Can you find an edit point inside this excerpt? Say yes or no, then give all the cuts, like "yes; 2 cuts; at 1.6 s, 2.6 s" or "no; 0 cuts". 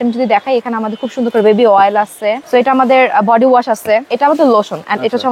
yes; 2 cuts; at 2.4 s, 4.1 s